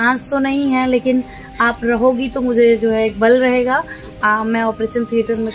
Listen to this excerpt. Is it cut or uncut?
uncut